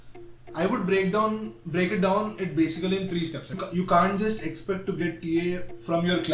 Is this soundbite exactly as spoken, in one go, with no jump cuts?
no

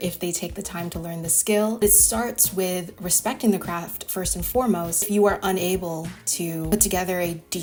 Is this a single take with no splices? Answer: yes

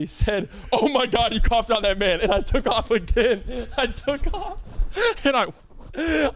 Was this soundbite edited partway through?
no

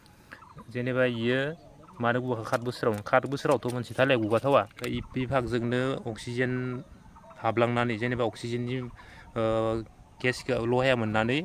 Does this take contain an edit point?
yes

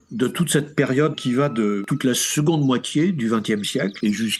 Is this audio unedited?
yes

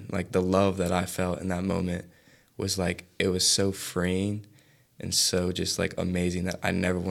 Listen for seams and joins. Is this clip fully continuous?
yes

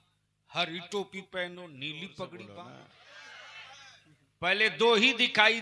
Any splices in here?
yes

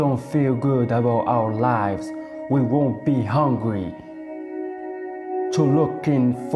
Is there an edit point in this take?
yes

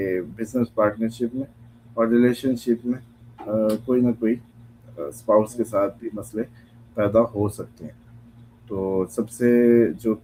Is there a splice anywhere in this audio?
no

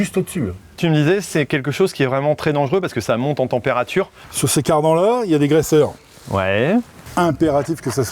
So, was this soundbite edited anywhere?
yes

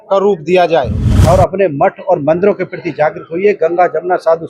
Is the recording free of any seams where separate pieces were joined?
no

